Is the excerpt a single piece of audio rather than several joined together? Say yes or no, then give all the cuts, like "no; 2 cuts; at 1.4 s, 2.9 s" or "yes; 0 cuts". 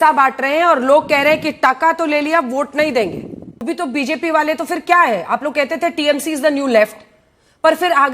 no; 1 cut; at 3.6 s